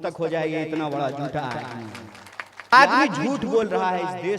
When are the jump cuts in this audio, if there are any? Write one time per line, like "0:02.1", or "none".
0:02.7